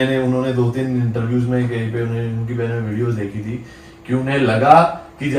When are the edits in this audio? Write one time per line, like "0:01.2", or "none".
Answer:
none

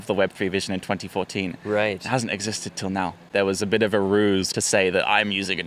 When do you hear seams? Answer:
0:03.2
0:04.5

